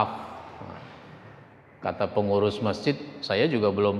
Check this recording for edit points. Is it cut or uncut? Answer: cut